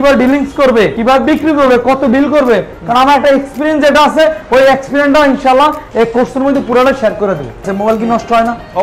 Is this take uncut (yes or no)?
no